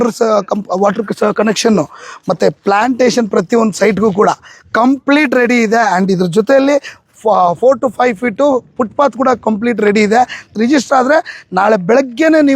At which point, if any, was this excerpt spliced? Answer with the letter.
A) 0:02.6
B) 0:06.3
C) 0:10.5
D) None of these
C